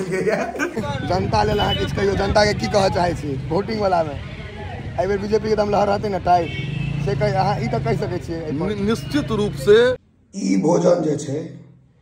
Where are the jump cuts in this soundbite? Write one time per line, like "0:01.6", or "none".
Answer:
0:00.7
0:10.1